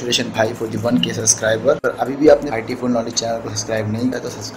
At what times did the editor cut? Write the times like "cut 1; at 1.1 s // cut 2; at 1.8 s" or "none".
cut 1; at 1.8 s